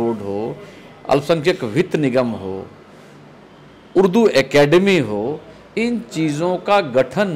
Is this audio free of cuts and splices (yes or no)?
yes